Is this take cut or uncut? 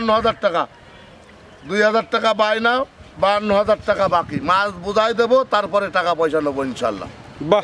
uncut